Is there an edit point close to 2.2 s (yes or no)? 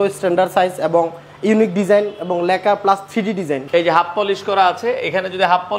no